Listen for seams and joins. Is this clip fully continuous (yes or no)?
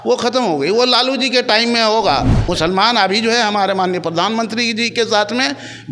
no